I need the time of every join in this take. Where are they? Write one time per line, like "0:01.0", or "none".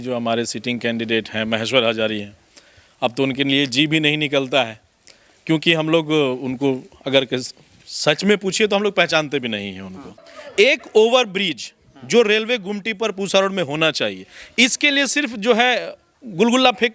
0:10.1